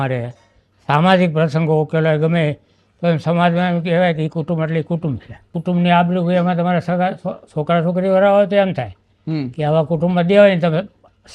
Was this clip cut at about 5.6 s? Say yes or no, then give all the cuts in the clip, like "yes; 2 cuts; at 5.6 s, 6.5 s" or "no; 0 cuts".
yes; 1 cut; at 5.6 s